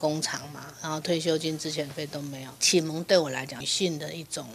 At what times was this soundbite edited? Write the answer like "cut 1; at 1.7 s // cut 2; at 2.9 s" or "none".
cut 1; at 3.6 s